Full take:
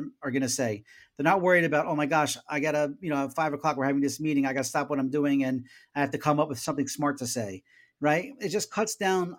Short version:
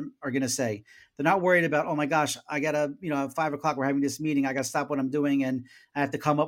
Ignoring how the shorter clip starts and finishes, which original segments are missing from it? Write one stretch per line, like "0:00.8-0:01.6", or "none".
none